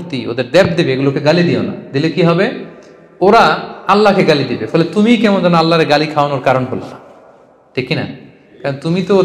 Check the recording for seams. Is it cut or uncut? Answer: uncut